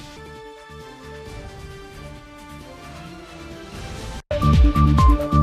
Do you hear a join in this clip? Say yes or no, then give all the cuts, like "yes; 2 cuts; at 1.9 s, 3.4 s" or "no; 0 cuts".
yes; 1 cut; at 4.2 s